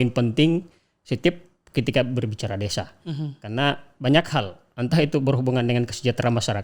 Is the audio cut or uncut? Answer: uncut